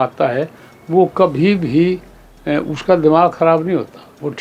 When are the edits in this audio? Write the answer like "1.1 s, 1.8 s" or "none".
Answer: none